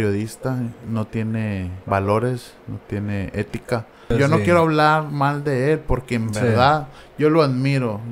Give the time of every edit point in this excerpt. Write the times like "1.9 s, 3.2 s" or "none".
1.1 s, 4.1 s